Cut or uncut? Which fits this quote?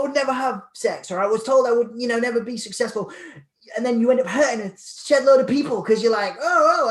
uncut